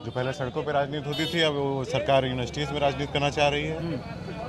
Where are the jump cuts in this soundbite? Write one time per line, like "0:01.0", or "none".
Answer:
none